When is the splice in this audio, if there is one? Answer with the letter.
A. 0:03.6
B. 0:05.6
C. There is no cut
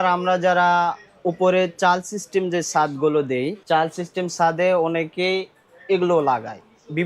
A